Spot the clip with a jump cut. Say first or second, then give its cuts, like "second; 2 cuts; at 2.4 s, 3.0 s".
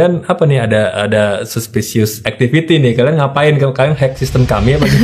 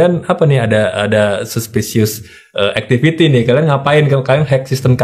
first; 1 cut; at 2.3 s